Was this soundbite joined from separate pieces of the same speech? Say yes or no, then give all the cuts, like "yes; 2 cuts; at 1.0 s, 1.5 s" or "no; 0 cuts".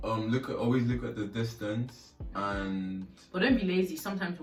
no; 0 cuts